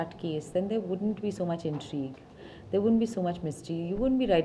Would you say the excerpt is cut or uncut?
uncut